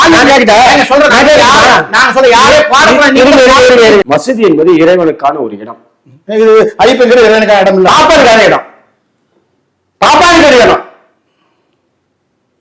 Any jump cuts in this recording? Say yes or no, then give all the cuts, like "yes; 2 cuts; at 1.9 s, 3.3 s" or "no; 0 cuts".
yes; 1 cut; at 4.0 s